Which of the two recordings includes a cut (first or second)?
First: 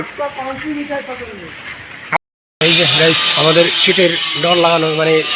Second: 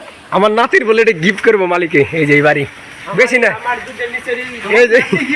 first